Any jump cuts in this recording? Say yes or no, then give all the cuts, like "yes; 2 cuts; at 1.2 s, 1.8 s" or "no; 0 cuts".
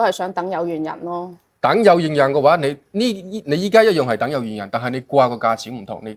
no; 0 cuts